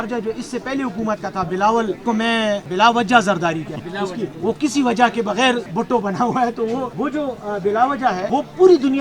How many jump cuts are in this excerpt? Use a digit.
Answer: 5